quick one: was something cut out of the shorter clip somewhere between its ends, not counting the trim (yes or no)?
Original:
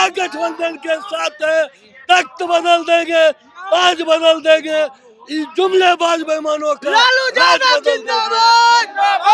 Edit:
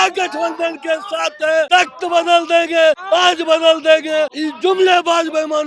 yes